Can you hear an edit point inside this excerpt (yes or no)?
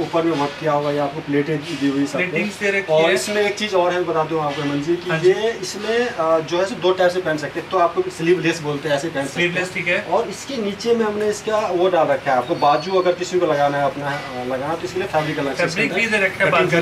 no